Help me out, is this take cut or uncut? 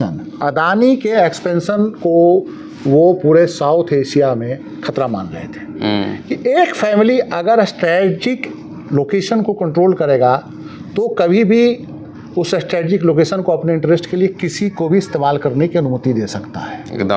uncut